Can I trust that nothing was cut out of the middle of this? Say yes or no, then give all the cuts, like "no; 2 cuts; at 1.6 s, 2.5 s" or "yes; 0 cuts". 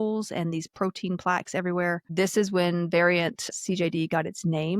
no; 2 cuts; at 2.1 s, 3.5 s